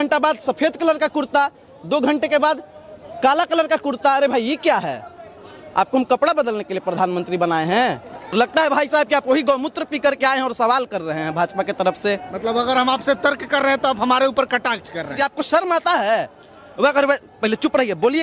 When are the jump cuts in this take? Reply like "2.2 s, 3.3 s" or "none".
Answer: 8.3 s, 15.1 s

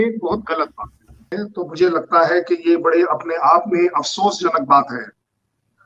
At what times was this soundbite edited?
none

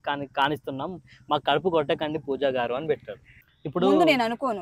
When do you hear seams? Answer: 3.1 s

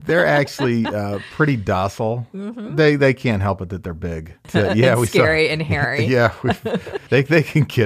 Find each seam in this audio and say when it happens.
4.5 s, 7.0 s

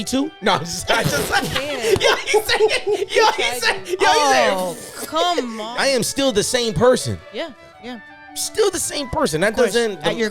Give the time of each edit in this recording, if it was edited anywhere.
5.6 s

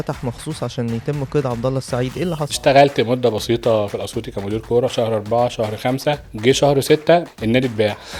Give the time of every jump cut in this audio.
2.5 s, 6.3 s, 7.3 s

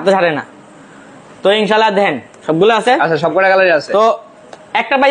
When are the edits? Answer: none

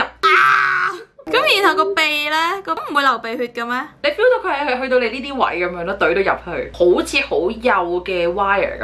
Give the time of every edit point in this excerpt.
2.8 s, 3.9 s

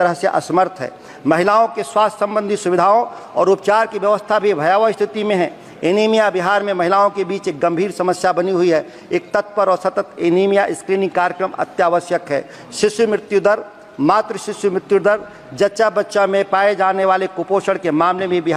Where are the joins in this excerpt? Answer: none

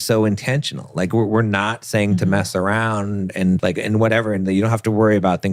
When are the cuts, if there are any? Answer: 3.6 s

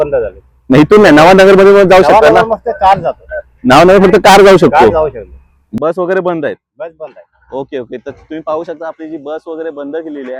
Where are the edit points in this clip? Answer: none

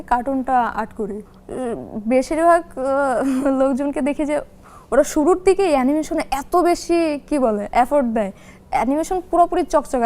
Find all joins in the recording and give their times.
1.2 s

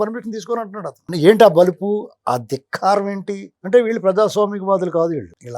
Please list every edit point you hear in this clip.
1.0 s

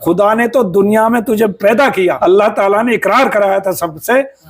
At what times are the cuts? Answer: 2.2 s

